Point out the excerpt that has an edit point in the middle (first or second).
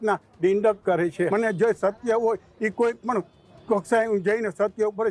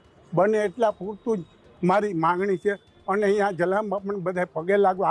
first